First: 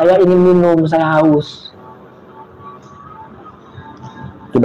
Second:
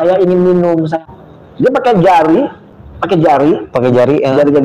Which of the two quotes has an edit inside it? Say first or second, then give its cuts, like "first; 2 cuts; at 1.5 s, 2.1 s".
second; 1 cut; at 1.0 s